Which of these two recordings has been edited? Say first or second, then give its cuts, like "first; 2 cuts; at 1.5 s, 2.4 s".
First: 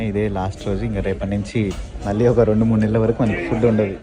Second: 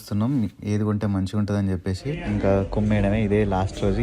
second; 1 cut; at 2.1 s